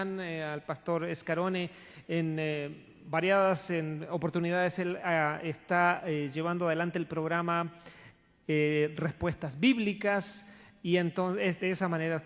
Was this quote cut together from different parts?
yes; 1 cut; at 5.6 s

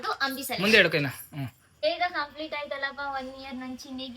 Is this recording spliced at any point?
yes; 1 cut; at 1.8 s

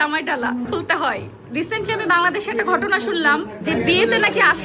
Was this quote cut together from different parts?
yes; 2 cuts; at 1.1 s, 3.5 s

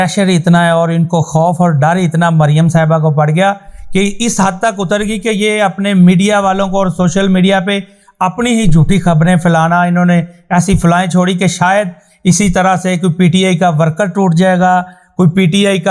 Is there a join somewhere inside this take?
no; 0 cuts

